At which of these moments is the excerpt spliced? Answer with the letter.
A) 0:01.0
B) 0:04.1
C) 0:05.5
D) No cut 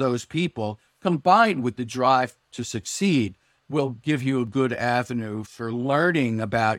C